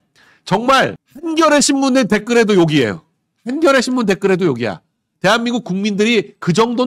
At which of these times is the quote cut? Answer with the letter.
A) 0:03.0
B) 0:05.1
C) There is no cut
C